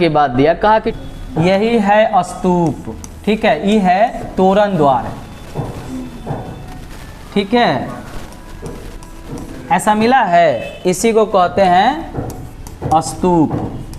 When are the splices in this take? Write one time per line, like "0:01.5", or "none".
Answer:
0:01.0